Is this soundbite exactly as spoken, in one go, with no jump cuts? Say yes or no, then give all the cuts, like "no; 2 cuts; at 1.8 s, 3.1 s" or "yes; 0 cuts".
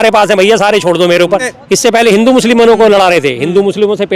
no; 1 cut; at 1.5 s